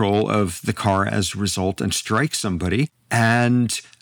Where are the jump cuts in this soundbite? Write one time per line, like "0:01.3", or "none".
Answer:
0:03.0

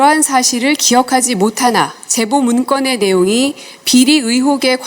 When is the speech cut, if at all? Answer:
0:02.0

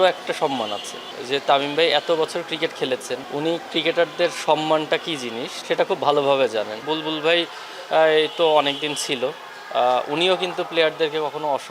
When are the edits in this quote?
0:01.0
0:03.2
0:05.5
0:06.9

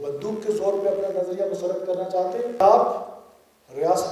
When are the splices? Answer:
0:02.6

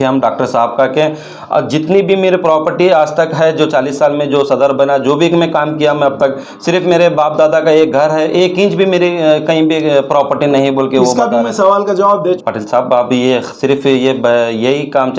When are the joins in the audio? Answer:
0:12.4

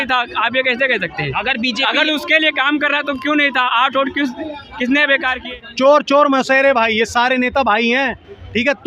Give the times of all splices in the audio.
0:05.4

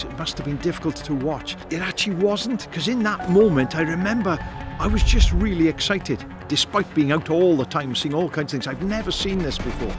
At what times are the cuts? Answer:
0:01.5
0:06.3

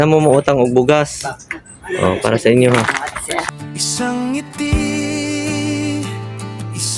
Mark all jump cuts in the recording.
0:03.4

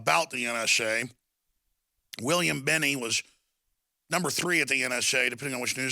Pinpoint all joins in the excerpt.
0:01.9

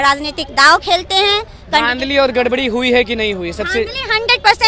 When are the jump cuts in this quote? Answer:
none

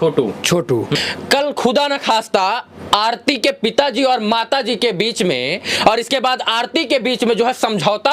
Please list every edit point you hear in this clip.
0:01.0

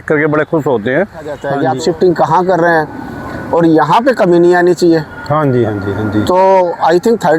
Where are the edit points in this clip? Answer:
0:01.5

